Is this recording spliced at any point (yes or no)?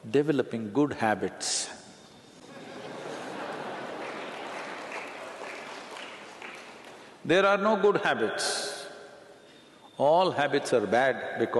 yes